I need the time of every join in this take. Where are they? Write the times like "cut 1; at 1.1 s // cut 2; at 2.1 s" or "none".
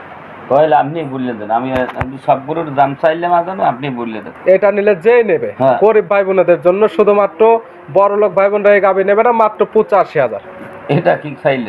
none